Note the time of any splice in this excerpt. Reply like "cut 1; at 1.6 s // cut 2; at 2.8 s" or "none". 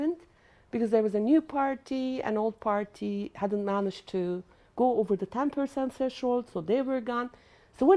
none